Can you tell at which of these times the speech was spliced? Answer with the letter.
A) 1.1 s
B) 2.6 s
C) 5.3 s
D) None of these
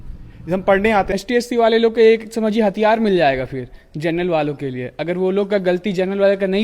A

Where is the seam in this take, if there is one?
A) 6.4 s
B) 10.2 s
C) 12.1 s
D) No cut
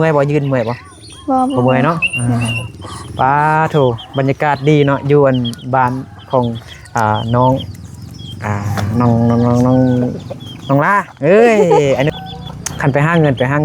C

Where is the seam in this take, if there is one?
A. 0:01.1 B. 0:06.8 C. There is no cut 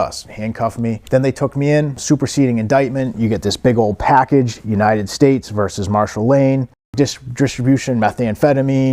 C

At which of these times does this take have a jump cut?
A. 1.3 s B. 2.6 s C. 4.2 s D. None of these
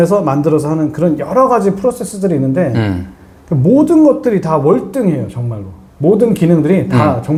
D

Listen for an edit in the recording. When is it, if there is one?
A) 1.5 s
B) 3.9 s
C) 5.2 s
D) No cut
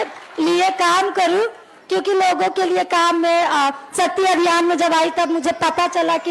D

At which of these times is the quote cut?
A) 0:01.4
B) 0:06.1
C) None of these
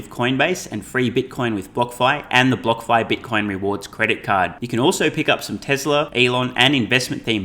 B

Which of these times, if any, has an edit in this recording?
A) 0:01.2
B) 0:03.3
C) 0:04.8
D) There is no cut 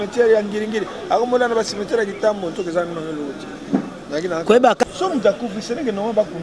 C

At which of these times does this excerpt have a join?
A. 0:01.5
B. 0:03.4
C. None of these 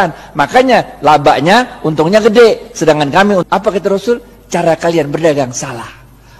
B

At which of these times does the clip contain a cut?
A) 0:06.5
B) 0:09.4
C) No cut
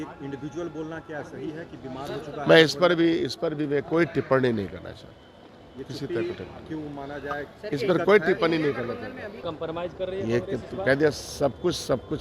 B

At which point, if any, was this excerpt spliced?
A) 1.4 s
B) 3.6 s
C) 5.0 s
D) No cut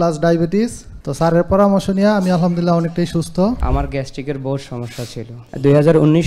B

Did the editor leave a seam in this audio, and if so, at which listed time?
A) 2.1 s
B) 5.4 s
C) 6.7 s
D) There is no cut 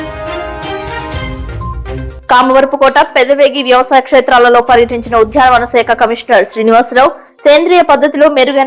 D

